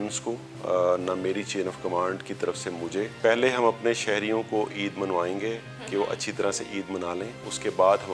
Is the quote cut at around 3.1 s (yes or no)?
yes